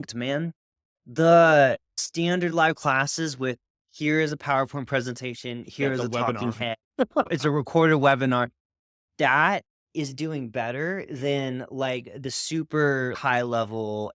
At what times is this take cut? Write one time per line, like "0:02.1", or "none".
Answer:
0:01.9
0:07.3
0:13.2